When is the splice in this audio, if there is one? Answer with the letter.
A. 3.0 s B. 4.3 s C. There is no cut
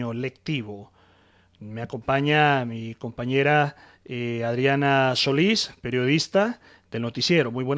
A